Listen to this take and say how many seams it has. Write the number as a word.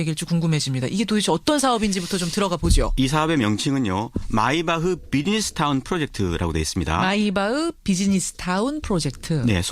one